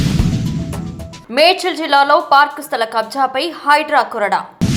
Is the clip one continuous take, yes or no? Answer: yes